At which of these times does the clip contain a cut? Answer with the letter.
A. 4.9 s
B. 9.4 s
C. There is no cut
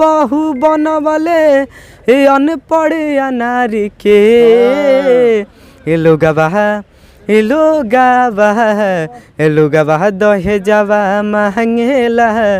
C